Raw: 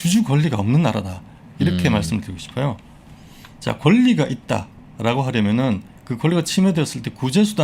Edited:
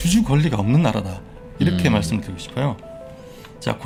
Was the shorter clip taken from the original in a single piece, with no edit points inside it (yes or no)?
yes